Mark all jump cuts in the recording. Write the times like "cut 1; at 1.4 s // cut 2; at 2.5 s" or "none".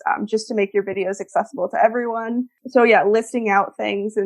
cut 1; at 2.6 s